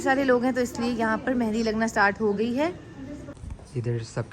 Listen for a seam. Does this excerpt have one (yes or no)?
yes